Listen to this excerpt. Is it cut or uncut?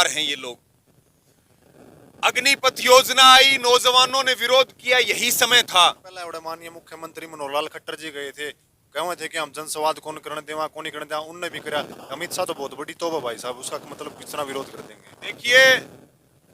cut